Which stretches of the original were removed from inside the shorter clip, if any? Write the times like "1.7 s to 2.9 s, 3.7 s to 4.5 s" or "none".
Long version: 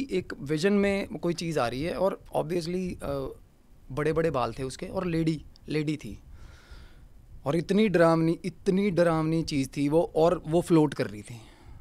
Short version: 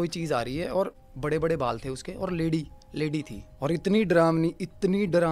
2.2 s to 3.7 s, 6.2 s to 7.3 s